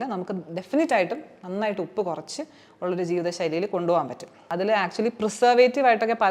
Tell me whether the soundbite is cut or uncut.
cut